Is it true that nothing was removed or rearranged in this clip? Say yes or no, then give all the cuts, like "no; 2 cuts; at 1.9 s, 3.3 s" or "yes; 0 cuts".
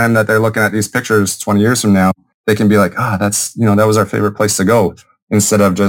no; 1 cut; at 2.3 s